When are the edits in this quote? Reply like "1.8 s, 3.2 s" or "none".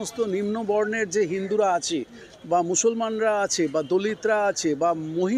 none